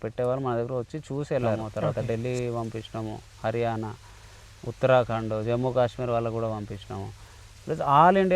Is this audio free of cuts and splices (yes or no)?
no